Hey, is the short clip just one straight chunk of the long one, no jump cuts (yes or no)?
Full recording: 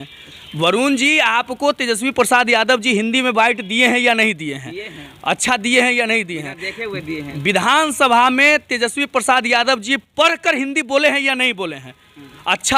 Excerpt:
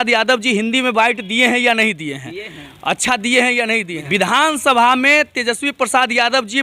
no